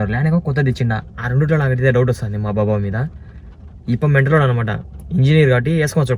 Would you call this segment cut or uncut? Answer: uncut